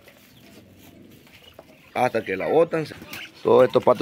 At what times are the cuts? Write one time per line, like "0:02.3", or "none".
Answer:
0:02.9